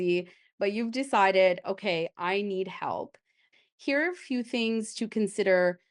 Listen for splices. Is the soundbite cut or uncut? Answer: cut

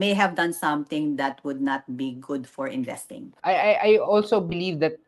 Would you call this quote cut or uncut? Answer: cut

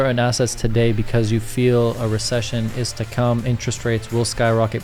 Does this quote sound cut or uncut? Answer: uncut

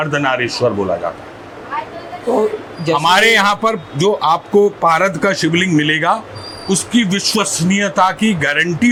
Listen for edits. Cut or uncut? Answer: uncut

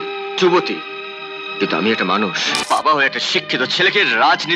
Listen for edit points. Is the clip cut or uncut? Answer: cut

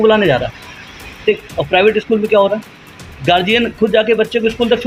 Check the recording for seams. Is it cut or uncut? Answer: uncut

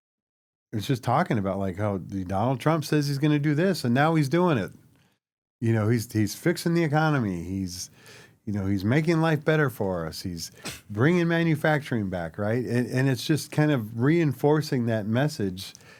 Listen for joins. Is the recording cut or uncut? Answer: uncut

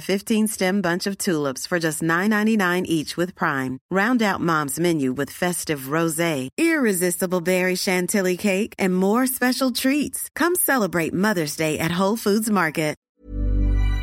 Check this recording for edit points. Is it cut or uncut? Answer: cut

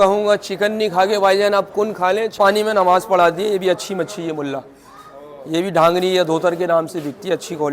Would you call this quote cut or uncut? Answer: cut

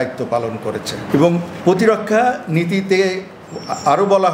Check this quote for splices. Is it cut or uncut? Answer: uncut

